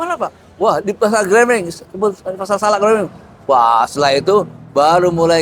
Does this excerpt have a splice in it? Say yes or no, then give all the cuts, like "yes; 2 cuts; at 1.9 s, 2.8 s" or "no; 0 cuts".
no; 0 cuts